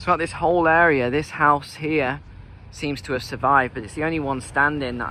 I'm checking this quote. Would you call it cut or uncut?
uncut